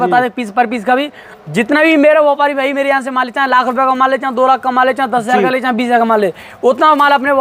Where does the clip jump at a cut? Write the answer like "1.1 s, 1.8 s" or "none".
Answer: none